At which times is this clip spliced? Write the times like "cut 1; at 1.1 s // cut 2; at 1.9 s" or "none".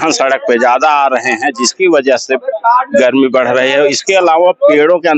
none

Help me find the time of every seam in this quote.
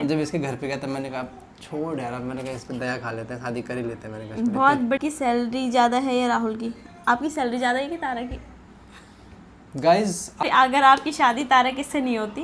cut 1; at 5.0 s // cut 2; at 10.4 s

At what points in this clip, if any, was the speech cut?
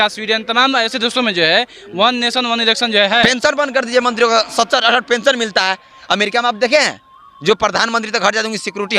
cut 1; at 3.2 s

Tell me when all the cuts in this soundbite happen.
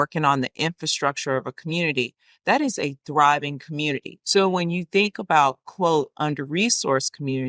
cut 1; at 4.1 s

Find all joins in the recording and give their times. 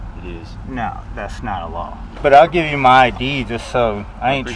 cut 1; at 2.0 s

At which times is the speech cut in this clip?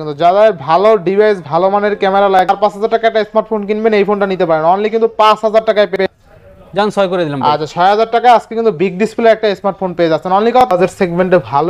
cut 1; at 2.5 s // cut 2; at 6.0 s // cut 3; at 10.7 s

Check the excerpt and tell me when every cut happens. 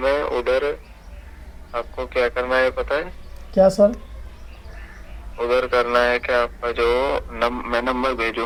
none

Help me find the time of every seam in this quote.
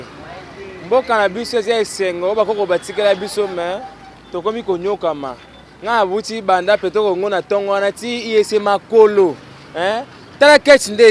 none

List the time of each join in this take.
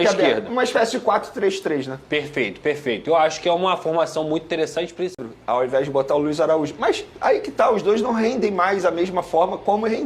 cut 1; at 5.2 s

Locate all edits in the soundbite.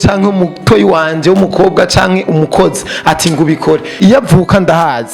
cut 1; at 3.9 s

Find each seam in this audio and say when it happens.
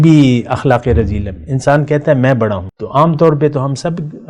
cut 1; at 2.7 s

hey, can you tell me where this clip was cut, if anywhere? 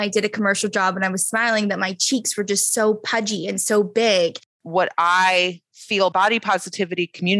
cut 1; at 4.6 s // cut 2; at 6.1 s

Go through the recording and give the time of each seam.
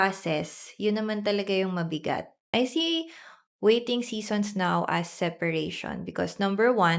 cut 1; at 2.4 s

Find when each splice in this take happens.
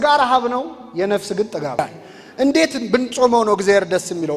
cut 1; at 1.8 s

